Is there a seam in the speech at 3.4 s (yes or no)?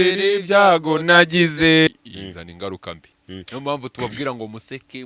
no